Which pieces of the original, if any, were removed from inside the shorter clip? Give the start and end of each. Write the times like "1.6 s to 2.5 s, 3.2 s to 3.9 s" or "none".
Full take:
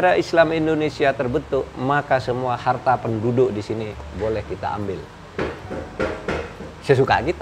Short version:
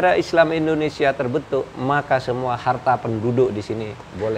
none